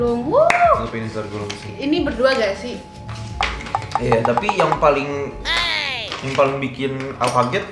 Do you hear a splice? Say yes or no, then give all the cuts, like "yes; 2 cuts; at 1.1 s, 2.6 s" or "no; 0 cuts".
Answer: no; 0 cuts